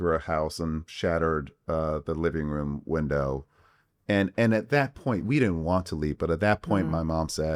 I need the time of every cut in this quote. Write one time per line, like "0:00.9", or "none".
none